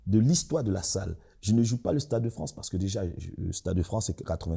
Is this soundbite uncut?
yes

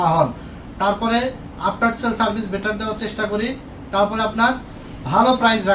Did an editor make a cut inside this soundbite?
no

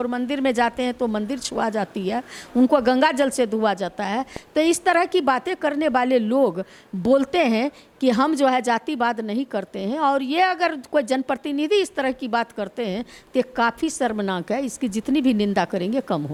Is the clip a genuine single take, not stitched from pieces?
yes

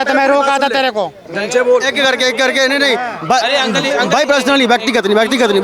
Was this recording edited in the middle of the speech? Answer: no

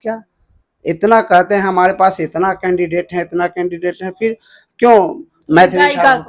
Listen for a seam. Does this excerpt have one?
no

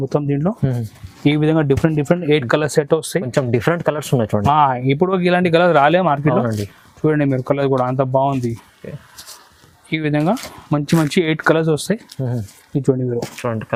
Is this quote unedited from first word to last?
yes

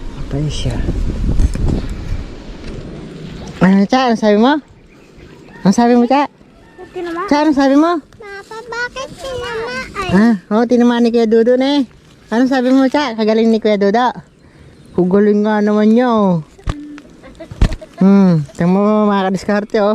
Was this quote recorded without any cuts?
no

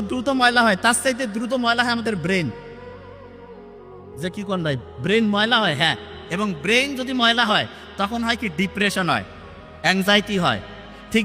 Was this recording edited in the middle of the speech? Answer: no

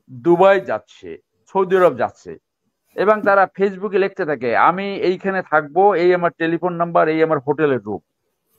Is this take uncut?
yes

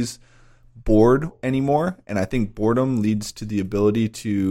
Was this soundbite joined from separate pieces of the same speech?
yes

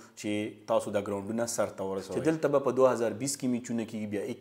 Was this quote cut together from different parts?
yes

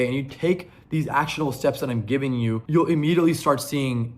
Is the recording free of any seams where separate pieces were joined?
no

